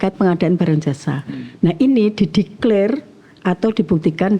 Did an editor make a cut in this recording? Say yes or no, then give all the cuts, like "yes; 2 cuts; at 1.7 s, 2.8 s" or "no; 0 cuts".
no; 0 cuts